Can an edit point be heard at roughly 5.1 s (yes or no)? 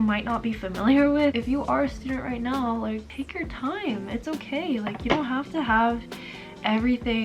no